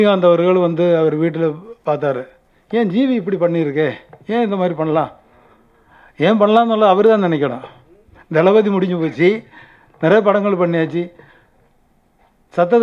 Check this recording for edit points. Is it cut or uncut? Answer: uncut